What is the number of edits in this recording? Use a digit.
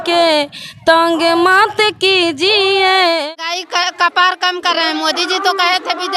1